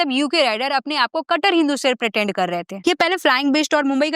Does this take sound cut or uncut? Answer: cut